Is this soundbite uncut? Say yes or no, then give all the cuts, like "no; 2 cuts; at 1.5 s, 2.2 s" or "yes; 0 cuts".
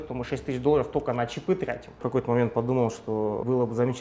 no; 1 cut; at 2.0 s